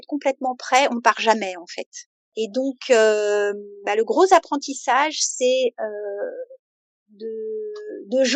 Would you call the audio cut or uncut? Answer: uncut